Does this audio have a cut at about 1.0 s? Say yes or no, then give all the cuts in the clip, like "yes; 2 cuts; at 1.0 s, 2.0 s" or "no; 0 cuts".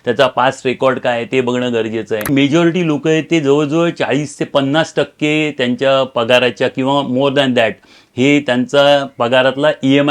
no; 1 cut; at 2.3 s